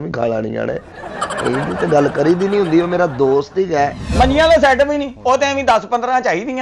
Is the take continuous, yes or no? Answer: no